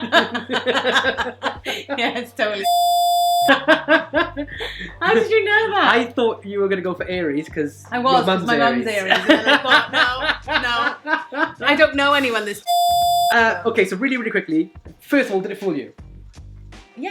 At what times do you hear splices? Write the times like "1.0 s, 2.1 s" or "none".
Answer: none